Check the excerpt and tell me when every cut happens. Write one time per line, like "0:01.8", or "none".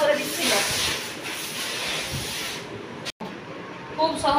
0:03.2